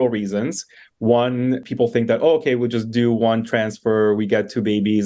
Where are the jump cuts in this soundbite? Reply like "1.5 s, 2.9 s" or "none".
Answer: 1.6 s